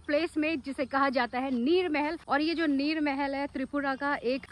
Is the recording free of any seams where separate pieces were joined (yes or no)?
yes